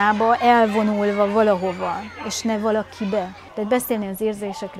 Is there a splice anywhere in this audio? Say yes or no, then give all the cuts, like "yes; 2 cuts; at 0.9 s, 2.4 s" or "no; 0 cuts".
yes; 1 cut; at 3.4 s